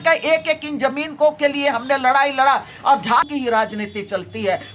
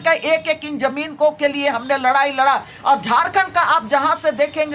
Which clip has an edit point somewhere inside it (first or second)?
first